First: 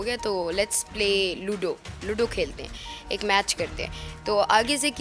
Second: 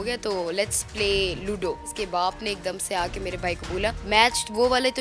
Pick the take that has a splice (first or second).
second